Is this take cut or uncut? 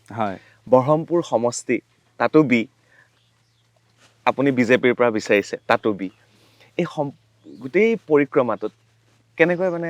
uncut